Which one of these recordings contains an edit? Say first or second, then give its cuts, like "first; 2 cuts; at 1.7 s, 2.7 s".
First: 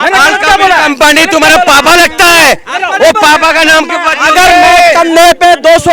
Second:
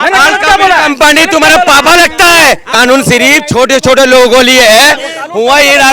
second; 1 cut; at 2.7 s